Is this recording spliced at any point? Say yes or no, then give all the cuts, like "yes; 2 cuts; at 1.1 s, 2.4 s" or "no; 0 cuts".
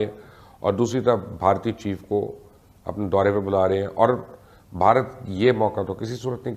no; 0 cuts